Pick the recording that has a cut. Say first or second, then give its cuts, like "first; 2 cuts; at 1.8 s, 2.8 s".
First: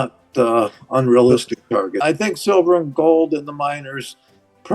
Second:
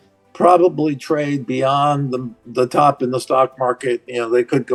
first; 1 cut; at 1.9 s